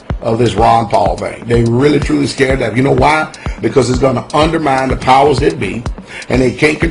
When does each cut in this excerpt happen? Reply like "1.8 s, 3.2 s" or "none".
5.2 s